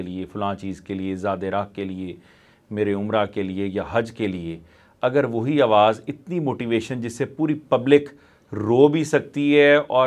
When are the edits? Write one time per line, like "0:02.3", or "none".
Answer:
none